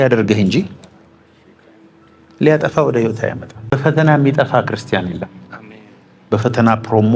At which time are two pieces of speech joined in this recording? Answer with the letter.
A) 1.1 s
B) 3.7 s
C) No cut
B